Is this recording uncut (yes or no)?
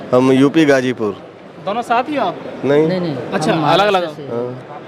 yes